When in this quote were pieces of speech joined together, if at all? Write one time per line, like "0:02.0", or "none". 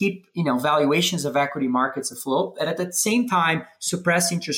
none